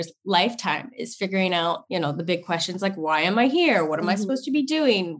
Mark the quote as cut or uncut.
cut